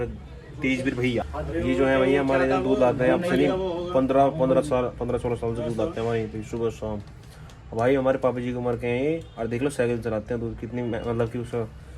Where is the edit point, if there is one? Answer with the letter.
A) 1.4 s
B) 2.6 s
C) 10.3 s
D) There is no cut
A